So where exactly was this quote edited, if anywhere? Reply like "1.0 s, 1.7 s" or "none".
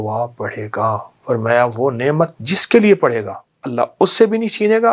1.1 s

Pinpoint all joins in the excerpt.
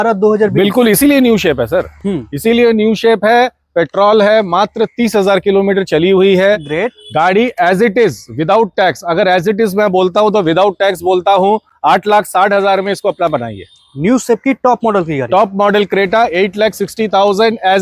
none

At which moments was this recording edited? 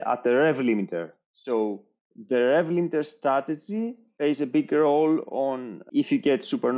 none

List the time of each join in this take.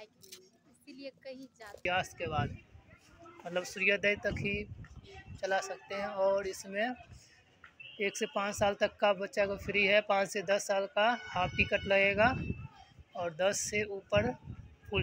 1.8 s

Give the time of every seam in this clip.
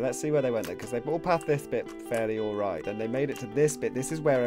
2.8 s

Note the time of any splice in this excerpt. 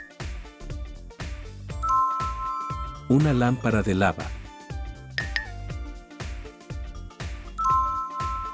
none

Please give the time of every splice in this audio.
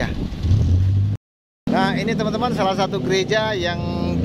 1.1 s

